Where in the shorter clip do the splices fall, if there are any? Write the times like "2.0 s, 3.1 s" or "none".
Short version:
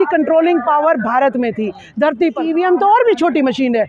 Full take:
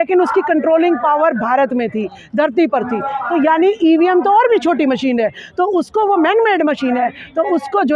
2.4 s